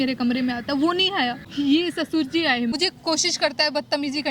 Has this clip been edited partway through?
yes; 2 cuts; at 1.5 s, 2.7 s

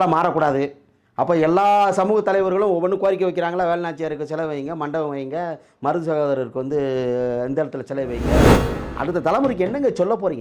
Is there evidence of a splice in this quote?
yes; 2 cuts; at 8.2 s, 8.9 s

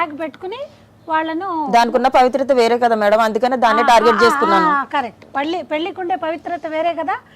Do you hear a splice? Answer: no; 0 cuts

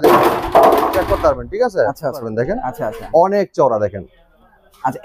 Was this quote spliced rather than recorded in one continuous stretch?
yes; 1 cut; at 2.3 s

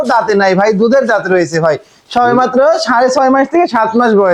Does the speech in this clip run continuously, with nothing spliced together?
yes; 0 cuts

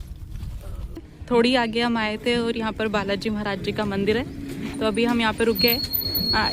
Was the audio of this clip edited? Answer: yes; 1 cut; at 1.1 s

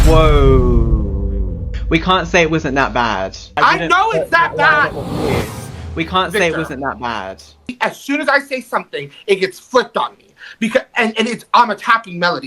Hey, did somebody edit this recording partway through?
yes; 1 cut; at 7.7 s

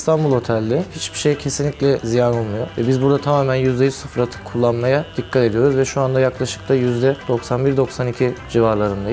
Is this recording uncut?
yes; 0 cuts

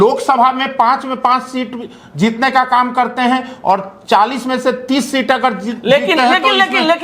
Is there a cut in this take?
no; 0 cuts

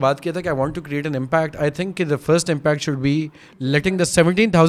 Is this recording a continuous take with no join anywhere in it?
yes; 0 cuts

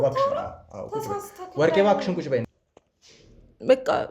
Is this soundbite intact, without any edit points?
no; 1 cut; at 2.4 s

